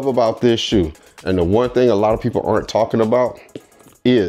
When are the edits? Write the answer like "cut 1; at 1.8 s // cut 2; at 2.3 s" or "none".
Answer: none